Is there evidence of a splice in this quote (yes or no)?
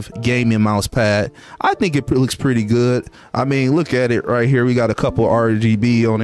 no